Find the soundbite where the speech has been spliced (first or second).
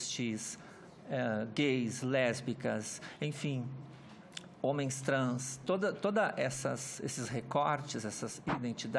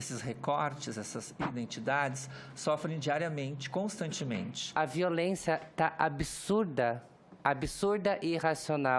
second